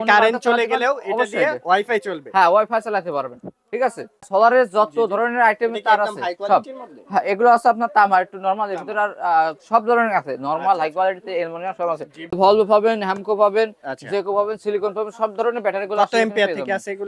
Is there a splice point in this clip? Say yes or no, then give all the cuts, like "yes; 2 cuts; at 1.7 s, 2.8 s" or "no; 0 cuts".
yes; 2 cuts; at 4.3 s, 12.3 s